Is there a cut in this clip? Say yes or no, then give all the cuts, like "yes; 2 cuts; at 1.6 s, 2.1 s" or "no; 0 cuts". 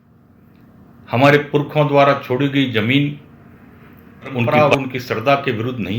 yes; 1 cut; at 4.5 s